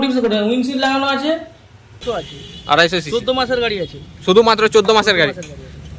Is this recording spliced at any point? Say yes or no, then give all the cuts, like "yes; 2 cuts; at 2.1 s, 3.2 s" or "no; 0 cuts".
yes; 1 cut; at 2.0 s